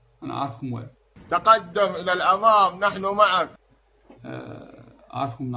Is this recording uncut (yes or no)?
yes